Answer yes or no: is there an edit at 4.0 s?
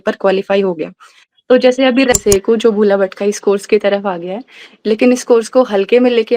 no